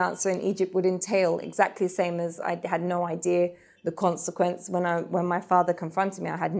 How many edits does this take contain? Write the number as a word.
zero